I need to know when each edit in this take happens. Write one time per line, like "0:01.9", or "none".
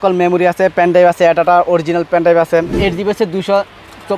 0:02.8